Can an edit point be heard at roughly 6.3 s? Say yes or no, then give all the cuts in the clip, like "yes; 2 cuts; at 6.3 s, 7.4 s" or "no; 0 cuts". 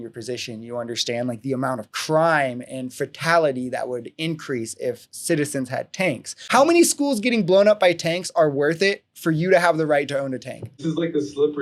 yes; 1 cut; at 6.3 s